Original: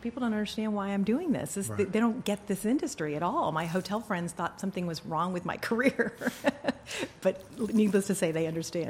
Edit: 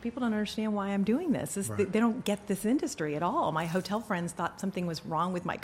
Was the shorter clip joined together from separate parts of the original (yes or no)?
no